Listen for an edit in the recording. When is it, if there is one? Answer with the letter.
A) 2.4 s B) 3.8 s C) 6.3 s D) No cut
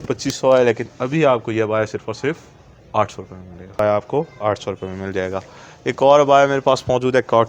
B